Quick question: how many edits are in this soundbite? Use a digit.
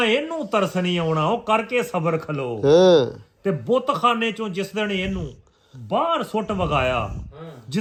0